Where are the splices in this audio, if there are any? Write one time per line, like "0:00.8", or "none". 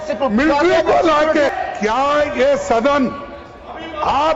0:01.5